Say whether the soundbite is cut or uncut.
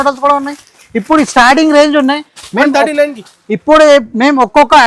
uncut